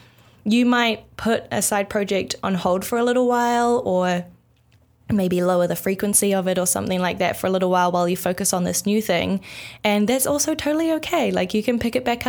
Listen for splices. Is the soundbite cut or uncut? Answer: uncut